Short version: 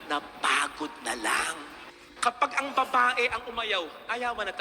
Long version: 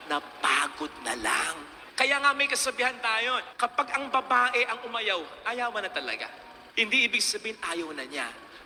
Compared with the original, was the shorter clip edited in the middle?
yes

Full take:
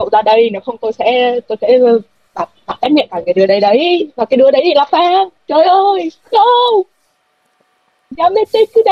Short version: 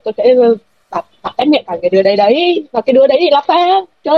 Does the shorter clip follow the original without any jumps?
yes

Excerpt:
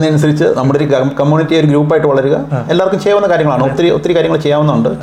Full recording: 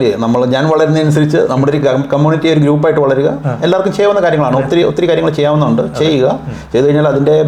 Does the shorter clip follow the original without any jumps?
yes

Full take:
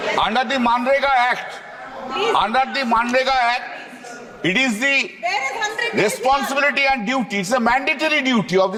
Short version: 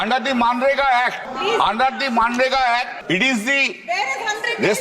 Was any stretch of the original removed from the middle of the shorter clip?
yes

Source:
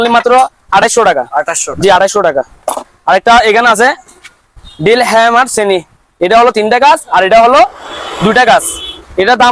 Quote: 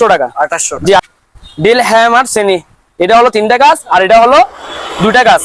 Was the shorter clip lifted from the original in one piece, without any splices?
no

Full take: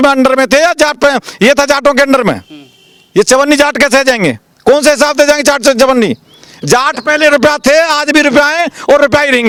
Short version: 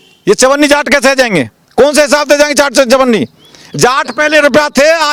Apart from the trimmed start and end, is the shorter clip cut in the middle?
no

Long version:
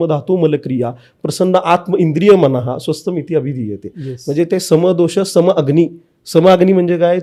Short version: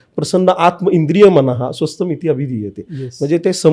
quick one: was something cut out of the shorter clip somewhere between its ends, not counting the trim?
no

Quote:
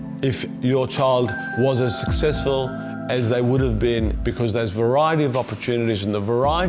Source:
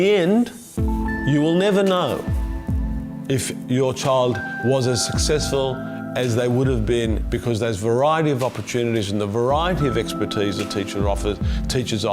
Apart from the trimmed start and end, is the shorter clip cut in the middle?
no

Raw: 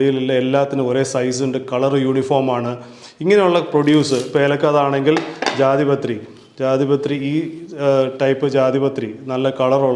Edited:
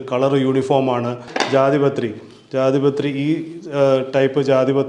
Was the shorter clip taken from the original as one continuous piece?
no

